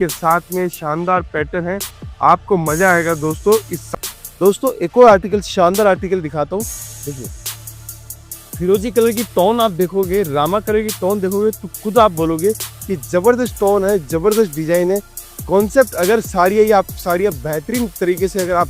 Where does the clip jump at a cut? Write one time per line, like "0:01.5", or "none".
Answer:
0:03.8